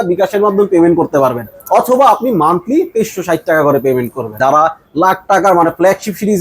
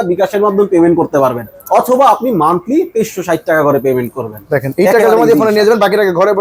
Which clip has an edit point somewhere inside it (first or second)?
first